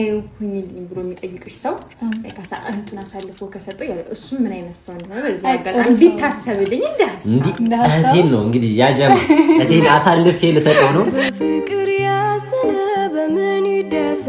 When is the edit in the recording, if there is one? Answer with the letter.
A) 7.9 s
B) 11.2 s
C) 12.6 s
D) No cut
B